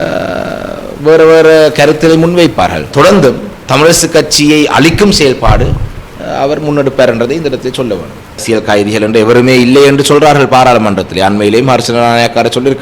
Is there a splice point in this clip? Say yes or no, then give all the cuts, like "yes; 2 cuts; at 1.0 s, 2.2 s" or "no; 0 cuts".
yes; 2 cuts; at 2.9 s, 8.4 s